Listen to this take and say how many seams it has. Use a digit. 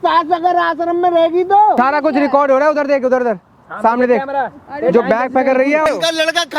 2